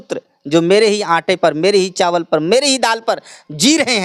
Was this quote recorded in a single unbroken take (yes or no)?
yes